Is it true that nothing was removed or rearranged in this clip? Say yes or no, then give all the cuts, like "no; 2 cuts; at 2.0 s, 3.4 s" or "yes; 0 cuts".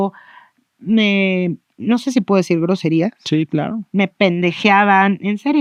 yes; 0 cuts